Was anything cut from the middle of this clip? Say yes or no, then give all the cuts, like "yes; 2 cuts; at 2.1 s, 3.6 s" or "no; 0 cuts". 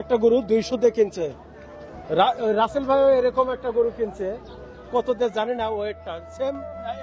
no; 0 cuts